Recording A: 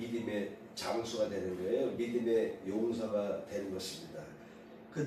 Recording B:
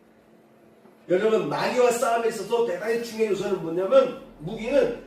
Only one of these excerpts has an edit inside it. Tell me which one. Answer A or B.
B